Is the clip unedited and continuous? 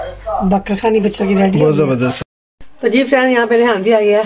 no; 1 cut; at 2.2 s

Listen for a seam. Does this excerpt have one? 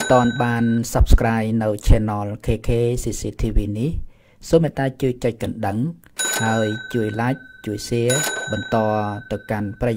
no; 0 cuts

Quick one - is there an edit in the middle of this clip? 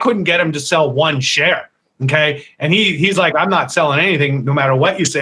no; 0 cuts

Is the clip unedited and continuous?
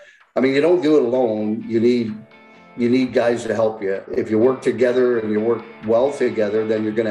no; 1 cut; at 4.1 s

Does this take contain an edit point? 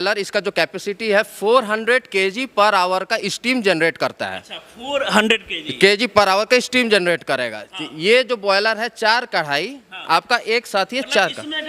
no; 0 cuts

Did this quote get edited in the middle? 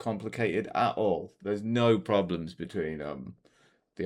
no; 0 cuts

